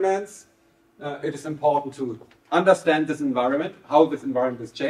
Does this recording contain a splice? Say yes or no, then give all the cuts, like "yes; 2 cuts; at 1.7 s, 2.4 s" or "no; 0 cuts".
no; 0 cuts